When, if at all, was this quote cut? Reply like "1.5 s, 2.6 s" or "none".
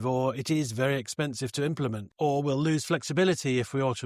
2.0 s